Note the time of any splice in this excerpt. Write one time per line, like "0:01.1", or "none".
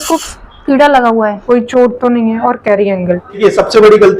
0:01.4
0:03.4